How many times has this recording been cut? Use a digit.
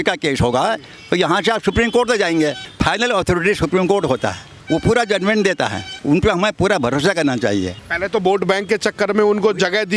4